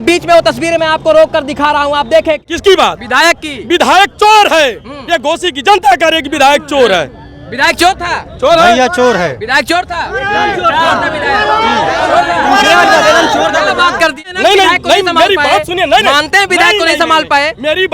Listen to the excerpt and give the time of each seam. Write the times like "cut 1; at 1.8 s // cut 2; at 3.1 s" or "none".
cut 1; at 2.4 s // cut 2; at 14.2 s